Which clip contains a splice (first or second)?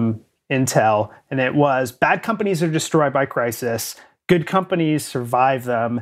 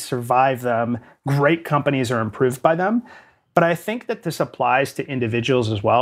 second